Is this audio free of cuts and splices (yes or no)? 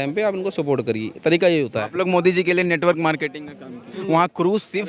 no